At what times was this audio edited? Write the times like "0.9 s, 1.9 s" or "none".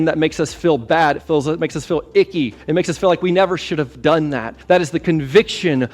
2.6 s, 4.5 s